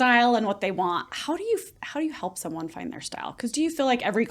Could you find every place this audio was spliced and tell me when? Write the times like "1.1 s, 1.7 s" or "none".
none